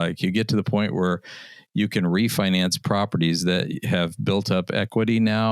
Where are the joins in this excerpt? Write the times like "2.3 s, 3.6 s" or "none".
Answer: none